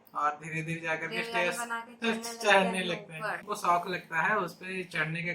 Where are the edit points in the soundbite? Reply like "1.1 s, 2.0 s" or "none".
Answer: 3.5 s